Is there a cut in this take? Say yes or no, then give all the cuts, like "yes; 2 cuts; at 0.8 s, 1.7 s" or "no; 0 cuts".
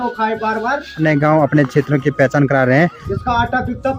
yes; 2 cuts; at 1.0 s, 3.1 s